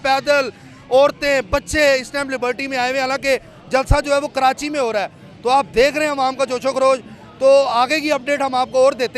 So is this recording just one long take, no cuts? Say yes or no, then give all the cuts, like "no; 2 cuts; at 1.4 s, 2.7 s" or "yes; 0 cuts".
yes; 0 cuts